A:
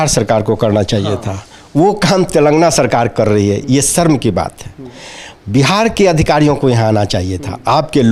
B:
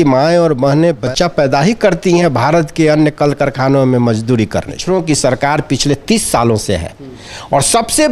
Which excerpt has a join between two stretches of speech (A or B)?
B